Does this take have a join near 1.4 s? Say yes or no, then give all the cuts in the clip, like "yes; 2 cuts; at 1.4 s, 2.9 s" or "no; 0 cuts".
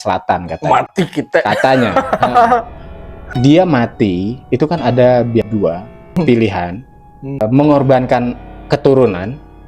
no; 3 cuts; at 3.3 s, 5.6 s, 7.4 s